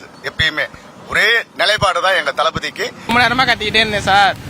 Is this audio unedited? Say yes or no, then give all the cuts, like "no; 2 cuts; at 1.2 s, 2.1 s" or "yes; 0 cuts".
no; 1 cut; at 3.1 s